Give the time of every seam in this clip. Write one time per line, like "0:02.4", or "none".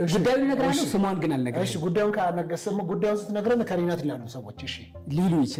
none